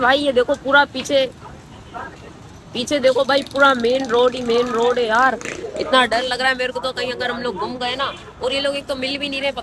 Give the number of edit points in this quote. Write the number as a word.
zero